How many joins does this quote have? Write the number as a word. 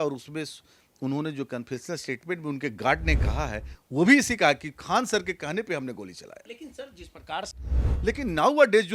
one